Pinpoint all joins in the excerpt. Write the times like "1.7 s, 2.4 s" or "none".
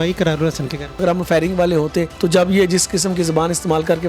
1.0 s, 2.1 s